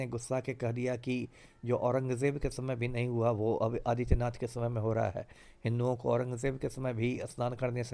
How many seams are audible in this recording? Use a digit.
0